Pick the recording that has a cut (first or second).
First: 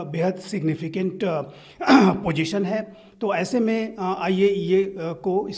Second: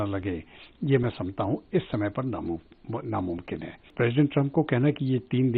second